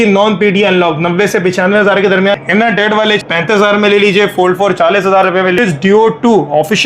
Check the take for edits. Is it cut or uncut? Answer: cut